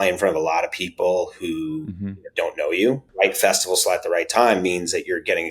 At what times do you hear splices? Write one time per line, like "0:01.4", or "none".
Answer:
0:03.1